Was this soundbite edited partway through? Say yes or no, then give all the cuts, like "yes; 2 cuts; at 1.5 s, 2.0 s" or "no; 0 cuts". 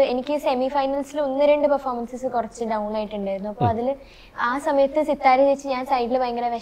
no; 0 cuts